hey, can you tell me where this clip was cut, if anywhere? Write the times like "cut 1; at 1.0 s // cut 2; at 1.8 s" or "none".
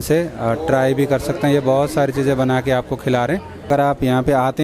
cut 1; at 3.7 s